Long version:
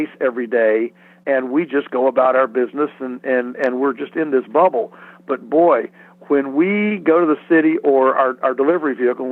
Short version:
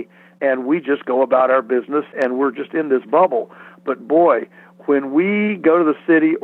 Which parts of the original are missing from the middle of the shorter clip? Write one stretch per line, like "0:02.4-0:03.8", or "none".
0:03.0-0:03.5